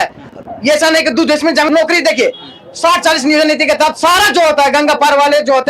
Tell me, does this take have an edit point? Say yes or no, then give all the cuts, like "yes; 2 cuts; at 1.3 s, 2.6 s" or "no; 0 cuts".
yes; 1 cut; at 1.7 s